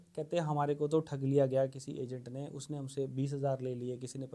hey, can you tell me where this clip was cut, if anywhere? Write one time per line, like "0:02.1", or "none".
none